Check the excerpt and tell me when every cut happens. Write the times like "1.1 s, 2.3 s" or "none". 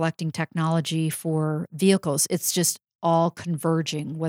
none